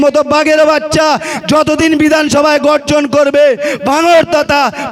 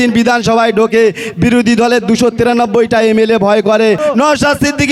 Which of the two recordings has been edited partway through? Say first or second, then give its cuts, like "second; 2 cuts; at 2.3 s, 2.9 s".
second; 1 cut; at 4.0 s